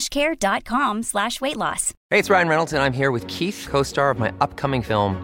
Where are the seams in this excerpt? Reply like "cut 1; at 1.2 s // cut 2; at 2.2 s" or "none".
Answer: cut 1; at 1.9 s